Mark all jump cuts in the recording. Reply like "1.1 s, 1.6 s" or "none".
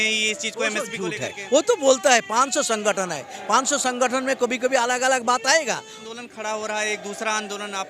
5.9 s